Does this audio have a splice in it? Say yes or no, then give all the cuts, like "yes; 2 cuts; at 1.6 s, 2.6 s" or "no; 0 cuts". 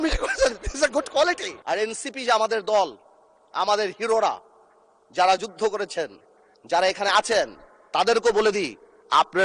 yes; 1 cut; at 1.5 s